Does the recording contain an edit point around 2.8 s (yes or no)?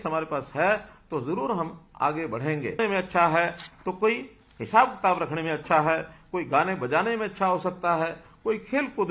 yes